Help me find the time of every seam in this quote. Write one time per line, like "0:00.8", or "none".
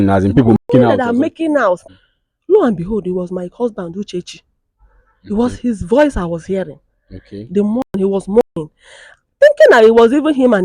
0:01.8